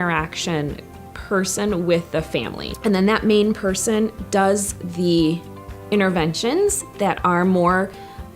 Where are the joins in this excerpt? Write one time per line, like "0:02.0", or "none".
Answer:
0:02.6